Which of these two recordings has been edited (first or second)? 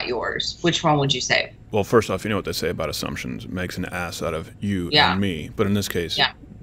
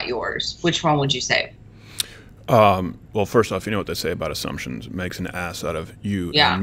first